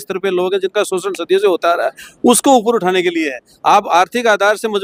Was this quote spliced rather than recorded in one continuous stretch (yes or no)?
no